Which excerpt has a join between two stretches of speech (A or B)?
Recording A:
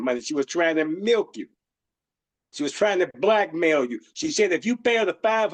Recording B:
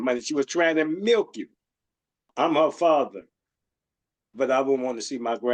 B